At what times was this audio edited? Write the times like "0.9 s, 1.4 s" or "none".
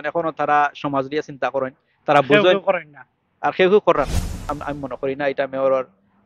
4.5 s